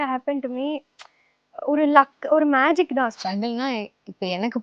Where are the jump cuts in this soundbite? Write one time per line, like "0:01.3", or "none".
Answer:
0:03.1